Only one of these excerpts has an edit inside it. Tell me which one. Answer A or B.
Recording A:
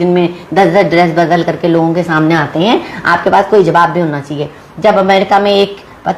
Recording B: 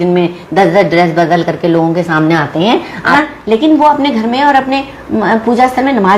B